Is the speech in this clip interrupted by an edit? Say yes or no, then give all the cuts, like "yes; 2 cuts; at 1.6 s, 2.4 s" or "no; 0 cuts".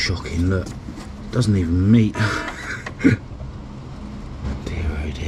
no; 0 cuts